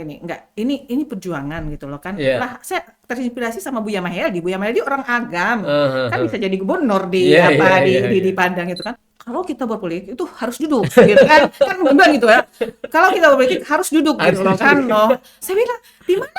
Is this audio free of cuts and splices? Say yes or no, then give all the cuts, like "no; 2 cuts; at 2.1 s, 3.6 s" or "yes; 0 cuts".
no; 1 cut; at 9.0 s